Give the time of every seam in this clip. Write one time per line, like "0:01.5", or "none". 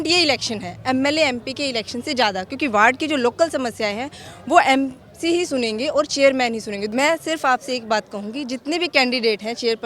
0:06.8